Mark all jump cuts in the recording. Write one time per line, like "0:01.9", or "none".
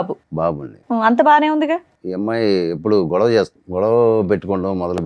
0:02.0
0:03.6